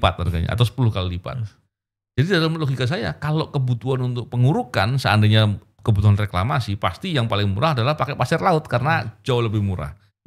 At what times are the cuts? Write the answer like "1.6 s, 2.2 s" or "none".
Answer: none

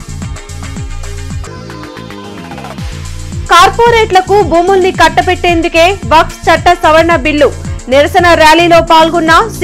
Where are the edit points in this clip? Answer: 1.5 s, 3.4 s

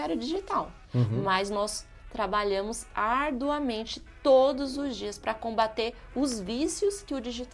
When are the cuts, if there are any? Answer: none

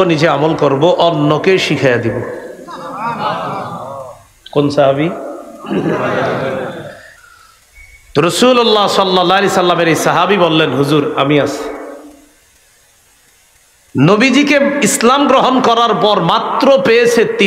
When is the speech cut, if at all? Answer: none

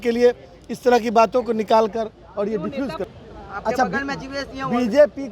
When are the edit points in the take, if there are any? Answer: 3.0 s

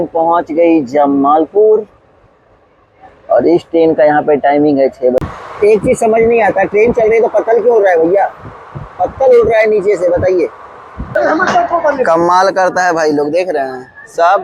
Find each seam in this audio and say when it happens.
5.2 s, 11.0 s

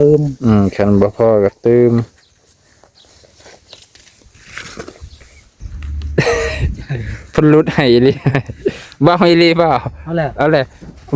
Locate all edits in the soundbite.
5.6 s

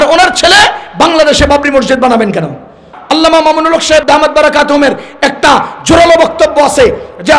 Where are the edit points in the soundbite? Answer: 2.9 s

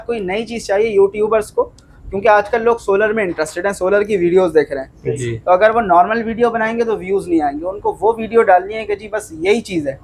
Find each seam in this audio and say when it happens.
none

